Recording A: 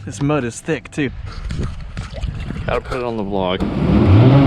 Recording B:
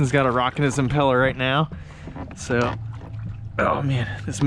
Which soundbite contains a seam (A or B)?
A